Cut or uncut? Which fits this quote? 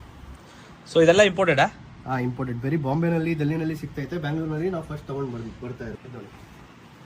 cut